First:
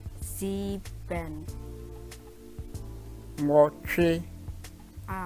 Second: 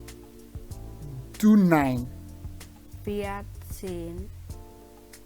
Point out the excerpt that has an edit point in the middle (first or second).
second